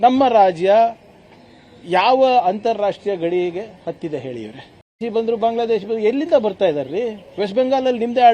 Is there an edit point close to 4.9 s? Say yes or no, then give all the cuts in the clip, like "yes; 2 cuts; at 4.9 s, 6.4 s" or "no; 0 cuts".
yes; 1 cut; at 4.9 s